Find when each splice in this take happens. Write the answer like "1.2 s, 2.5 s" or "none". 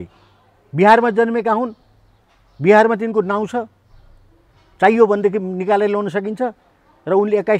none